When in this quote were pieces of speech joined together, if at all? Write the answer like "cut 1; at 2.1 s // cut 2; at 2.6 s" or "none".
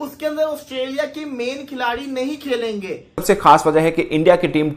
cut 1; at 3.2 s